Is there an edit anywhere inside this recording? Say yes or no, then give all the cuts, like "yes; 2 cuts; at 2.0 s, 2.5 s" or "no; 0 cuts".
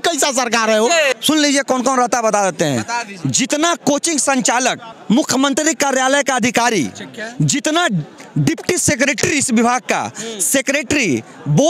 yes; 2 cuts; at 1.1 s, 4.9 s